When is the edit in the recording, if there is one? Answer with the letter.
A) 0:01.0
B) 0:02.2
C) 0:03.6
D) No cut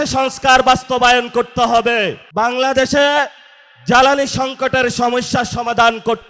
B